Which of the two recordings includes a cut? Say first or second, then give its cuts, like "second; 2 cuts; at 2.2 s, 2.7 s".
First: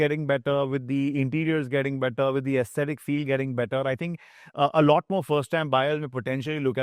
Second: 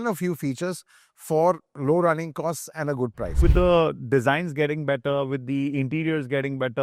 second; 1 cut; at 3.4 s